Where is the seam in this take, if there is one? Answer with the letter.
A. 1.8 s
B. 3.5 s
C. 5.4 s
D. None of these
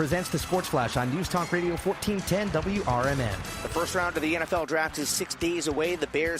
B